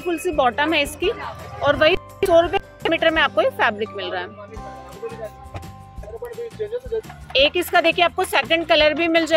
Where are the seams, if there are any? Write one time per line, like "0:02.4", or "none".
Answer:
none